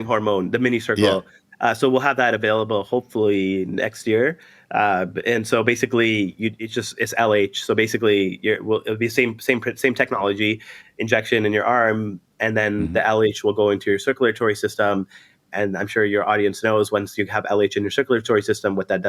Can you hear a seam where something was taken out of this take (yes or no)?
no